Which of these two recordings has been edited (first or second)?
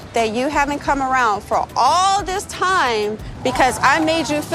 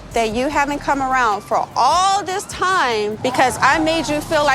second